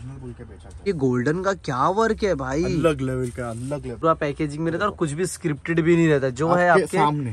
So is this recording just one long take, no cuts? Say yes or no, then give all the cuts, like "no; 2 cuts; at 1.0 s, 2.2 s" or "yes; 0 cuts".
no; 2 cuts; at 0.8 s, 4.0 s